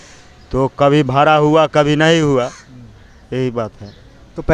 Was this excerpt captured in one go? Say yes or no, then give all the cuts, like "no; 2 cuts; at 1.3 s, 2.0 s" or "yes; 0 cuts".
yes; 0 cuts